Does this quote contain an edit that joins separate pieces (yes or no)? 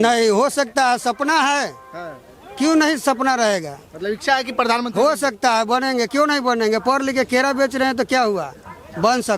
no